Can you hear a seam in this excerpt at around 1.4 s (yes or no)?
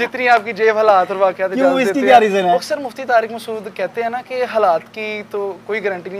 no